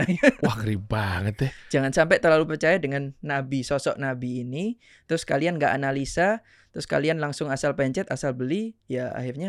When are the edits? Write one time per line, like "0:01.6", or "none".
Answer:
none